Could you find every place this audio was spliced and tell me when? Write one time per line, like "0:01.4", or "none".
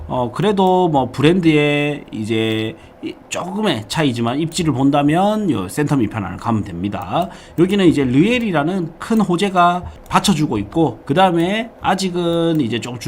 0:09.9
0:11.0